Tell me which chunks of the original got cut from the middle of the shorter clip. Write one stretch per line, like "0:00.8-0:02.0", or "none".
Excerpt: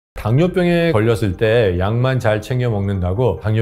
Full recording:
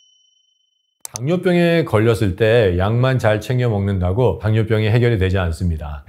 0:01.8-0:01.9